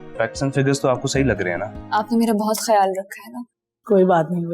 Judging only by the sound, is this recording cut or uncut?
cut